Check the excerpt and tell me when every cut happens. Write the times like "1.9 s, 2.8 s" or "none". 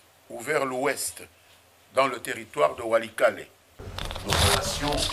3.9 s